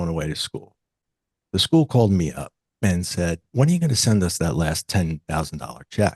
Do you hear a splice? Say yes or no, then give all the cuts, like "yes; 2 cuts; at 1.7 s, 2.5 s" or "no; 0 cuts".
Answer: no; 0 cuts